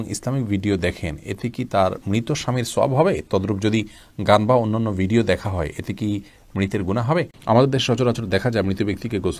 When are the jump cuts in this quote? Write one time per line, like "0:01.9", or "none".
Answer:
0:07.3